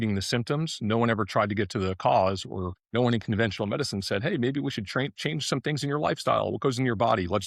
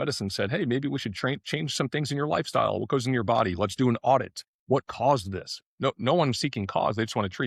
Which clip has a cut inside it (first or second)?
first